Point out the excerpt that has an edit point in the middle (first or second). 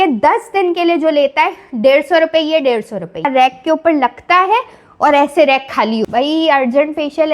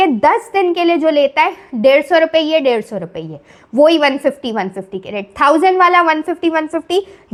first